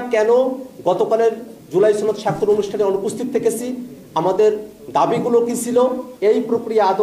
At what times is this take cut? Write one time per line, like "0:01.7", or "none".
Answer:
0:06.1

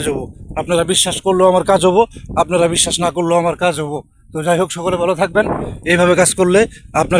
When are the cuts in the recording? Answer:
none

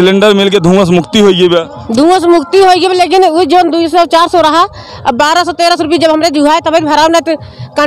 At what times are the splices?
none

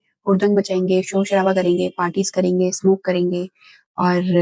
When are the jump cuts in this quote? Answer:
none

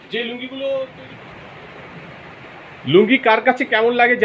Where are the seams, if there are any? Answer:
0:00.9

